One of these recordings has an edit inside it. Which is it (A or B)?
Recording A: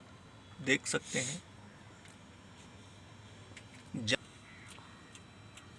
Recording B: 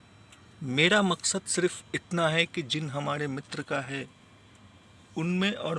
A